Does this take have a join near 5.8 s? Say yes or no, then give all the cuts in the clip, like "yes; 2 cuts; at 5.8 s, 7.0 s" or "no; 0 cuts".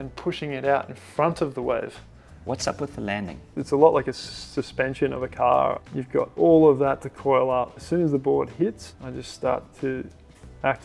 yes; 3 cuts; at 2.3 s, 3.5 s, 5.8 s